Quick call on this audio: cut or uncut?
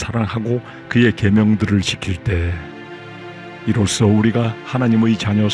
uncut